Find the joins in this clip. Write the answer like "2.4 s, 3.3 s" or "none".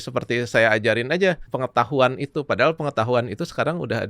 1.5 s